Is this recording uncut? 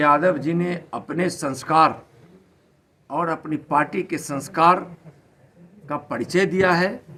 yes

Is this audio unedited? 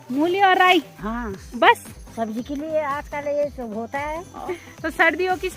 no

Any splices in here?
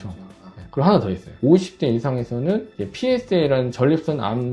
yes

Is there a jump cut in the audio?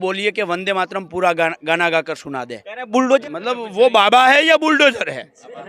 yes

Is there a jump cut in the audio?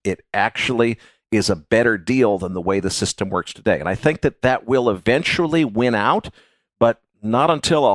yes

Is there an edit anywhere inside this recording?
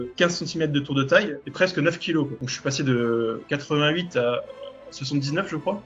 no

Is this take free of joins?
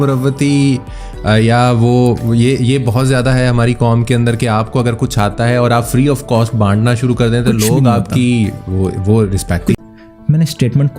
no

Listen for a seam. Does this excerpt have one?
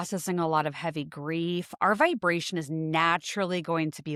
no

